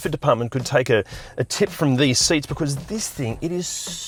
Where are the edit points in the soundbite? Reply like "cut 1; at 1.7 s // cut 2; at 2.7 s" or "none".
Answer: none